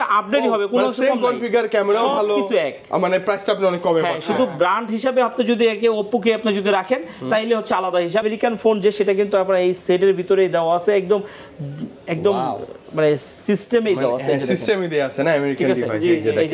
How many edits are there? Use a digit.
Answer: 1